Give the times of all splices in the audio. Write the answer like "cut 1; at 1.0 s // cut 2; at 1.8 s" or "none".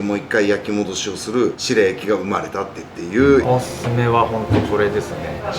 cut 1; at 3.5 s